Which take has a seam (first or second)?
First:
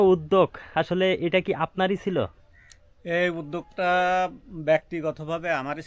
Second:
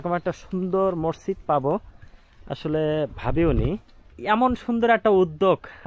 second